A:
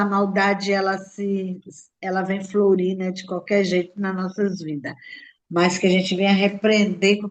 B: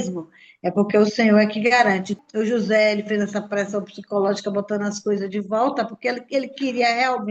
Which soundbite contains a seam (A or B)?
B